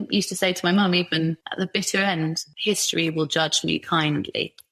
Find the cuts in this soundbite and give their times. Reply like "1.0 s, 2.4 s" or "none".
1.4 s, 2.5 s